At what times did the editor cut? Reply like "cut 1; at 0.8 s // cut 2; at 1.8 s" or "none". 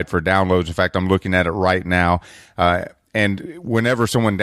cut 1; at 3.2 s